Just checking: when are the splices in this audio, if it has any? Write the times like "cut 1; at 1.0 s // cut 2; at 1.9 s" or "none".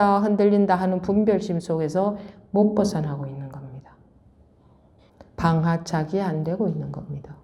cut 1; at 5.0 s

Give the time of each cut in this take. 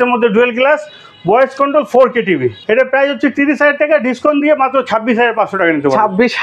cut 1; at 2.6 s

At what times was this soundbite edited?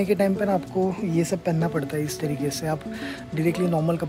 none

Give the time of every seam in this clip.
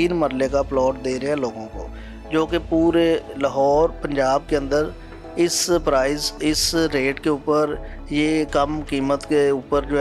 none

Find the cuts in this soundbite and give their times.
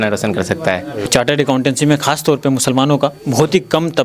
cut 1; at 1.1 s

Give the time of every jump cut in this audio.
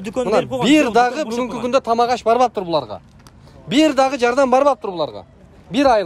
none

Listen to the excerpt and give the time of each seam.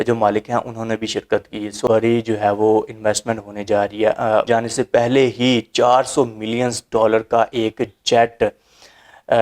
cut 1; at 1.9 s // cut 2; at 4.4 s

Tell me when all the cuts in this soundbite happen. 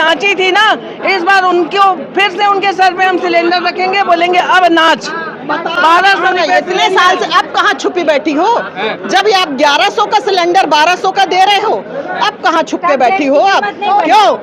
none

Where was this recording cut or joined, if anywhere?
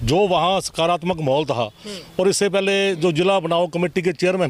none

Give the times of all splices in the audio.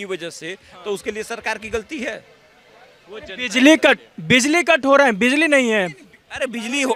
none

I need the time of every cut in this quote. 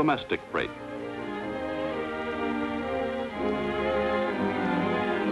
cut 1; at 3.0 s

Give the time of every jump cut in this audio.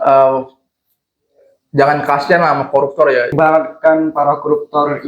cut 1; at 3.3 s

